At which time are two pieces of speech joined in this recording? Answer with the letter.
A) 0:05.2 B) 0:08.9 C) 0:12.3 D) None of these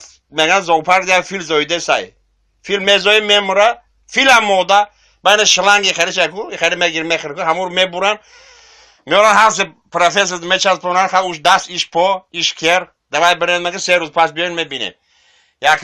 B